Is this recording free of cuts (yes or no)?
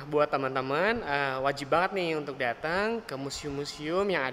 yes